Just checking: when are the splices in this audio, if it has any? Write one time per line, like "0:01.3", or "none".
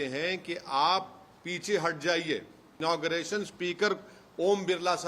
0:02.8